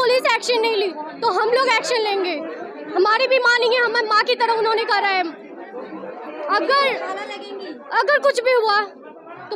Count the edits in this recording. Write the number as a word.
zero